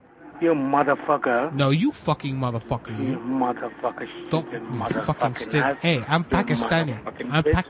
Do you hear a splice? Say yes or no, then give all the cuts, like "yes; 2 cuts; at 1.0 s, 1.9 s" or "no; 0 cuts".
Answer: no; 0 cuts